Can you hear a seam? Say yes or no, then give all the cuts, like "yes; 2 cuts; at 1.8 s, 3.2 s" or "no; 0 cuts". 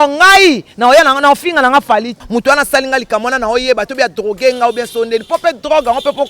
yes; 1 cut; at 2.2 s